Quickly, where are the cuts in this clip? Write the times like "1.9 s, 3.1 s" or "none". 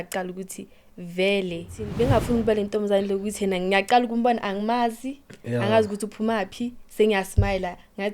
1.8 s